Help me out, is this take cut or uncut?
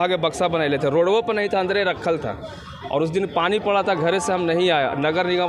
uncut